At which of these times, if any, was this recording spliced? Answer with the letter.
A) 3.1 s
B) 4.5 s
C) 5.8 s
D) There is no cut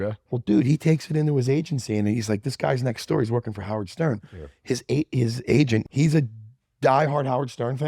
C